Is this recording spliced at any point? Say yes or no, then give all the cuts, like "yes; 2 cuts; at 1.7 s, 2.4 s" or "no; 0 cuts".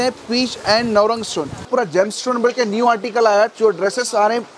yes; 2 cuts; at 1.6 s, 3.5 s